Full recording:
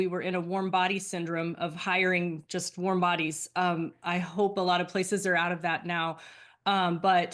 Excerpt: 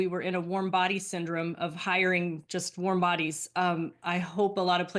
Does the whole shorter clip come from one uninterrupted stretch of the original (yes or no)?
yes